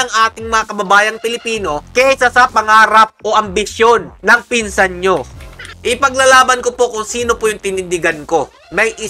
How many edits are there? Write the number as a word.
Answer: one